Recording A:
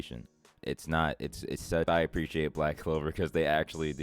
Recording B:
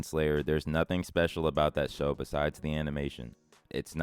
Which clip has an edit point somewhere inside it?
A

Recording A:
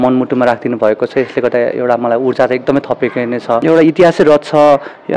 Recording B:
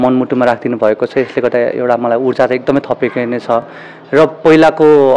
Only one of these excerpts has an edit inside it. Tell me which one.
A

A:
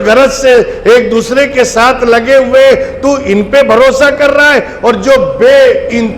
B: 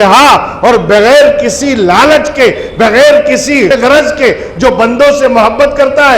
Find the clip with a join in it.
B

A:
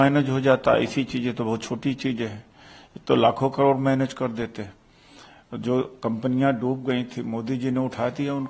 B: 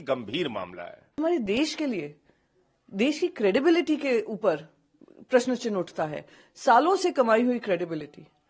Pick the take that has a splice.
B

